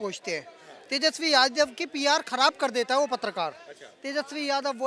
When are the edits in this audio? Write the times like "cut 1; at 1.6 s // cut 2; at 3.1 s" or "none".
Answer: none